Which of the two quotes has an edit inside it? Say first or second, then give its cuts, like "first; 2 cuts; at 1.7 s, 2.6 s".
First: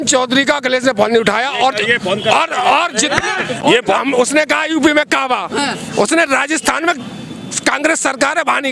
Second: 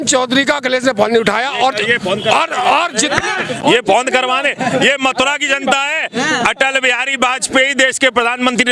first; 1 cut; at 4.0 s